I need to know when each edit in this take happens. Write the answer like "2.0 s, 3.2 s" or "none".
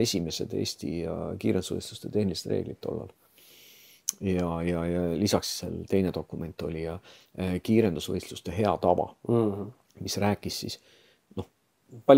none